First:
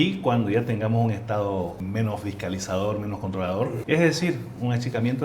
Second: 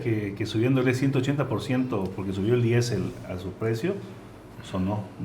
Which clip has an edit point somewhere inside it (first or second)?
first